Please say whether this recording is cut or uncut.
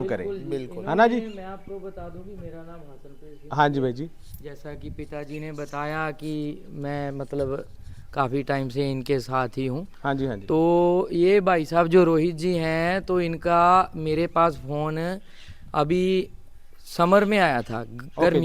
uncut